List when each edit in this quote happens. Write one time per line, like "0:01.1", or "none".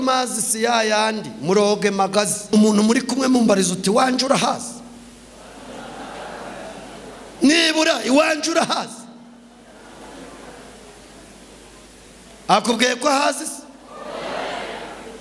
0:02.5